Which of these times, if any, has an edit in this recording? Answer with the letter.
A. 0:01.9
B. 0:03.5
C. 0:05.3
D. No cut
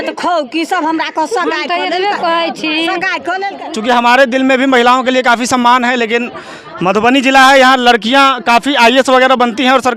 B